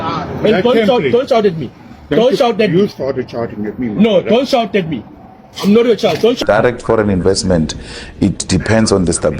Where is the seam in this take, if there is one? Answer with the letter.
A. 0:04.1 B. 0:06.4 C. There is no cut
B